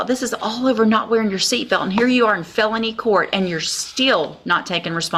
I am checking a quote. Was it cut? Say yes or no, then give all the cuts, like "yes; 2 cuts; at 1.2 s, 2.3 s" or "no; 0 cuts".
no; 0 cuts